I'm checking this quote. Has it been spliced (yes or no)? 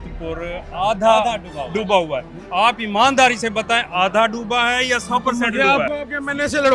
no